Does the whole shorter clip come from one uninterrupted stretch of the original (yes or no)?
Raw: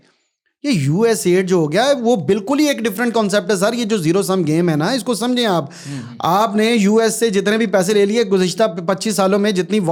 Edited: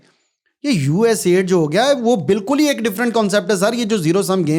yes